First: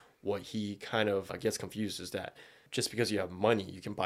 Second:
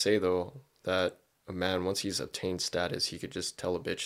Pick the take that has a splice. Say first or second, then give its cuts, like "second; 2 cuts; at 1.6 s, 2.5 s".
first; 2 cuts; at 1.3 s, 2.6 s